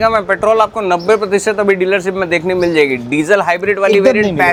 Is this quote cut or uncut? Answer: uncut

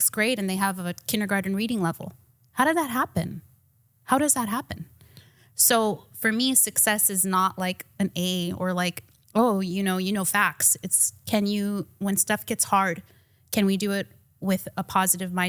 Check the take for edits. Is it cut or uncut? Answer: uncut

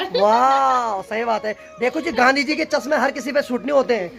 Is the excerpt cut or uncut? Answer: uncut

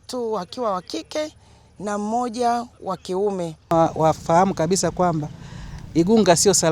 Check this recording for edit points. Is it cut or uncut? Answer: cut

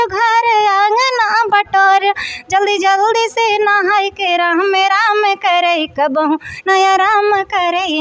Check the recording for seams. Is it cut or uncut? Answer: uncut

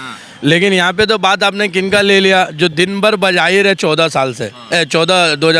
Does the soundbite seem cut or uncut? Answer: uncut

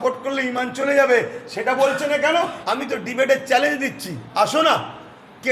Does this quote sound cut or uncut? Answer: cut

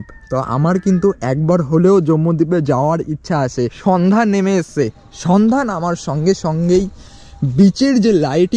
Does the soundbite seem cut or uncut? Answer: cut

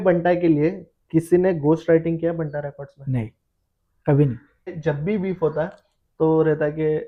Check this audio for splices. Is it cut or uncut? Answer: uncut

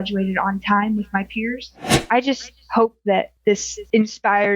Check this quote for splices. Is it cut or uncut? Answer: cut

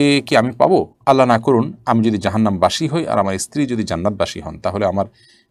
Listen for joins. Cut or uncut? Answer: uncut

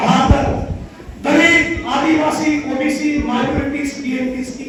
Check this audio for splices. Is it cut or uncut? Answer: uncut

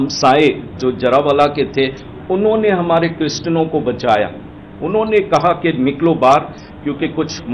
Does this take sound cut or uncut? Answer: uncut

